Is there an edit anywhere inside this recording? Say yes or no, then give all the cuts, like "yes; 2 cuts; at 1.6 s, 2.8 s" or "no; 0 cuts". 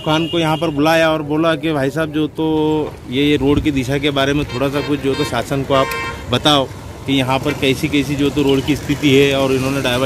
no; 0 cuts